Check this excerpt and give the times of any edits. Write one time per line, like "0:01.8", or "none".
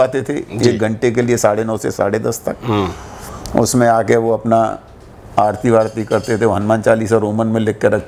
none